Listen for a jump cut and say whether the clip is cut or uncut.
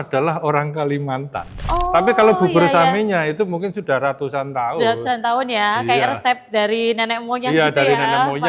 cut